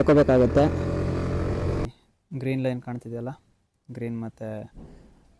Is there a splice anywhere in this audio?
yes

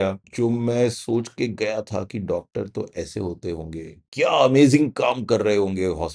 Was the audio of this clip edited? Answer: yes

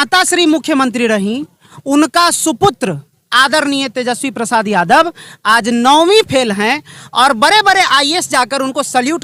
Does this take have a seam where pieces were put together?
no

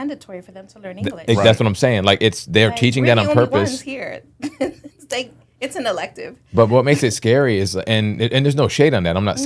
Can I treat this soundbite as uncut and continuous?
yes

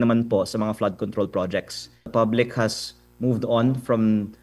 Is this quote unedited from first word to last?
no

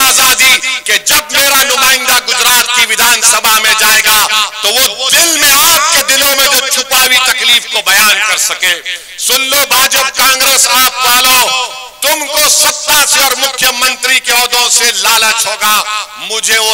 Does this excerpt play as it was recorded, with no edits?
yes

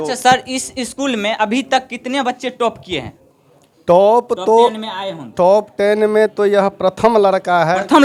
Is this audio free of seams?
yes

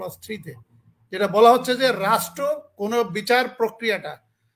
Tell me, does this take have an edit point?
no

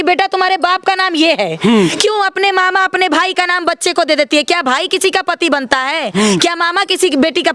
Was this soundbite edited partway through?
no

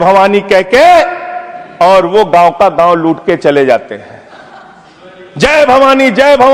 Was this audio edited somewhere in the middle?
no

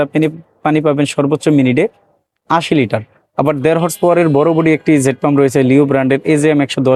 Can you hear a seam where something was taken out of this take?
no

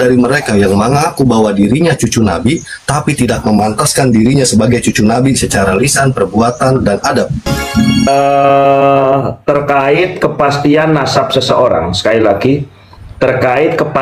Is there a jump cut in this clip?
yes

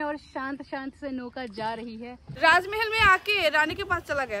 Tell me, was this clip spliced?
yes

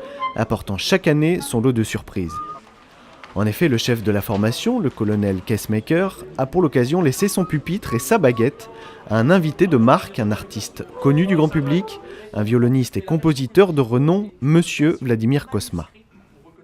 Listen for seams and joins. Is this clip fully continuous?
no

